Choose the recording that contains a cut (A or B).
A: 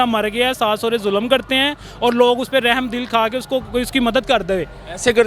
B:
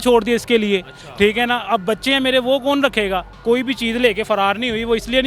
B